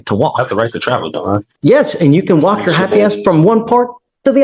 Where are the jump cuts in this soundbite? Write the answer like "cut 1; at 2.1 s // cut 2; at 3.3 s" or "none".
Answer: cut 1; at 1.5 s